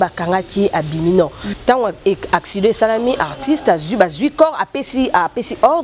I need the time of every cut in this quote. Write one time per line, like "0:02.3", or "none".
0:01.4